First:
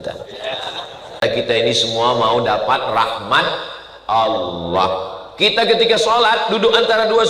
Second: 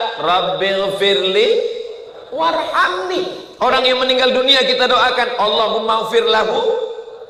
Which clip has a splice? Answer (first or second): first